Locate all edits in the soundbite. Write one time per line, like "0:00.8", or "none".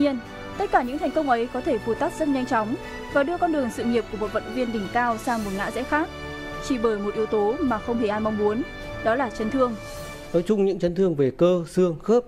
none